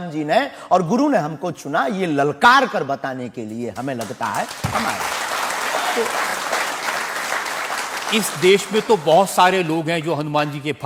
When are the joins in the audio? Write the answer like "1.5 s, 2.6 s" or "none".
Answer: none